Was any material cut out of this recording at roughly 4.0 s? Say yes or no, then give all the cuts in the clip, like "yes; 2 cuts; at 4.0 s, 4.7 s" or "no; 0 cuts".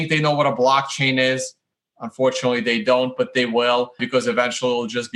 yes; 1 cut; at 4.0 s